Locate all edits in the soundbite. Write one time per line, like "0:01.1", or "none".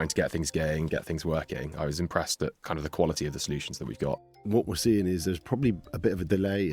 0:02.6
0:04.3